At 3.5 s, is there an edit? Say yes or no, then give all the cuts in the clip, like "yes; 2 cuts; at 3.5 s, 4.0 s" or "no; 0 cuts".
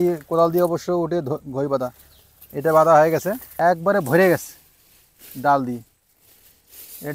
yes; 1 cut; at 3.5 s